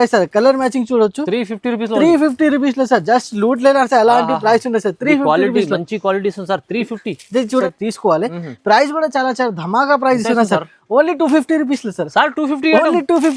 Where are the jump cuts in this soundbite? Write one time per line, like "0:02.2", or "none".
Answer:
0:07.6